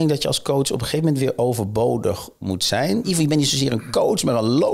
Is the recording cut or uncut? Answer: cut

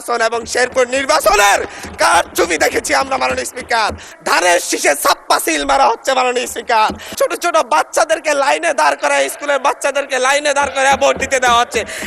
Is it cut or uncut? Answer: cut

